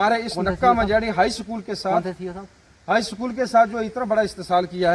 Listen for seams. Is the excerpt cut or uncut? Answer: uncut